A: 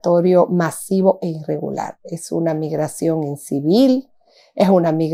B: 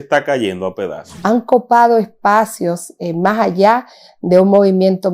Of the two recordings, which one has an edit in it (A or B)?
B